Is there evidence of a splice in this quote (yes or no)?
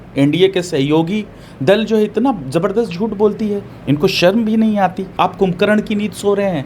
yes